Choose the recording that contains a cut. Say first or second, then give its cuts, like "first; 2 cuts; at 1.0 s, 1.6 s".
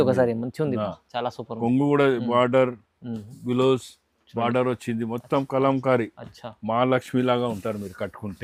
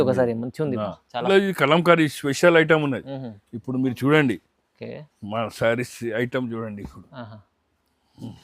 second; 1 cut; at 1.2 s